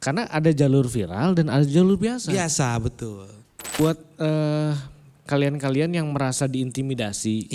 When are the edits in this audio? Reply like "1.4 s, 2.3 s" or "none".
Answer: 3.8 s